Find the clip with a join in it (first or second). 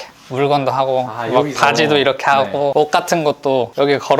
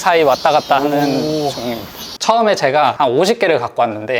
second